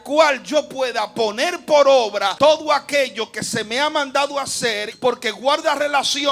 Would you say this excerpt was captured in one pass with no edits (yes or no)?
no